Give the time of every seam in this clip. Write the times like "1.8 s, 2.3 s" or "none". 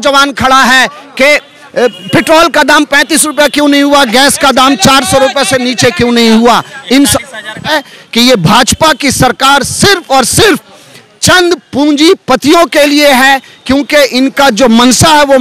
7.7 s